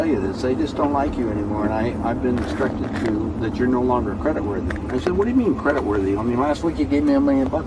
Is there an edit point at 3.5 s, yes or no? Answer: no